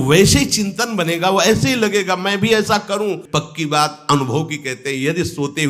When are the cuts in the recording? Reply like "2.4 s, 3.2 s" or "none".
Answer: 3.2 s